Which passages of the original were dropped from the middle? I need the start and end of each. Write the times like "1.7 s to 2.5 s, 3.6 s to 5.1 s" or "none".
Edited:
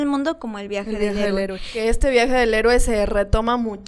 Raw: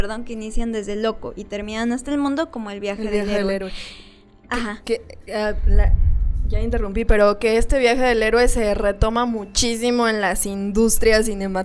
3.9 s to 7.4 s